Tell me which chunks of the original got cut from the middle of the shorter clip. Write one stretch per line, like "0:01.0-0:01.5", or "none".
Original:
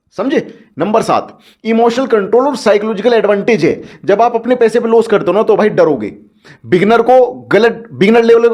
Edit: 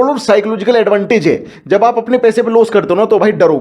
none